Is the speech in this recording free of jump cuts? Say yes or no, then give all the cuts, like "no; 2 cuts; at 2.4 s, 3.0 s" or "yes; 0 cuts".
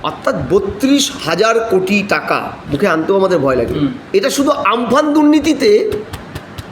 no; 1 cut; at 4.0 s